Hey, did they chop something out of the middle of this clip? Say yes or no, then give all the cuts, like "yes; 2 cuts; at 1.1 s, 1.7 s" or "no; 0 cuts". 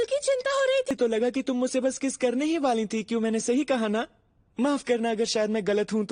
yes; 1 cut; at 0.9 s